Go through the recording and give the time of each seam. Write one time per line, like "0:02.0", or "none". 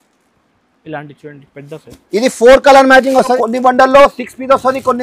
0:03.3